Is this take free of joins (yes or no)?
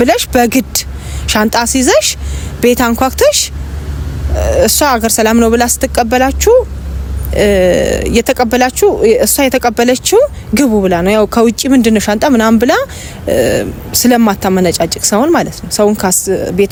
yes